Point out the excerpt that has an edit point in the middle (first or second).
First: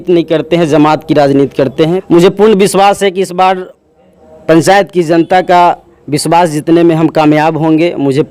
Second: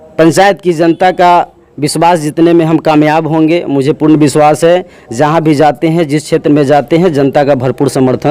first